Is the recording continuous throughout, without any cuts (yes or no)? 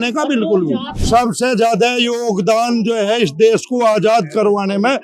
no